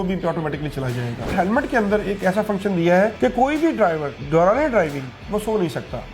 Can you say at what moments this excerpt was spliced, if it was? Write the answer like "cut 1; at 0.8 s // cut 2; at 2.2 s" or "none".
cut 1; at 1.3 s // cut 2; at 3.1 s // cut 3; at 4.1 s